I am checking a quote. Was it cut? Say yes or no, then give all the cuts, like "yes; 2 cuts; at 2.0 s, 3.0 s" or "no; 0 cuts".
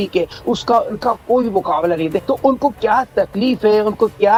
no; 0 cuts